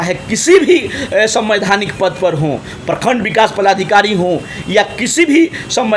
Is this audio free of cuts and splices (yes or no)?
yes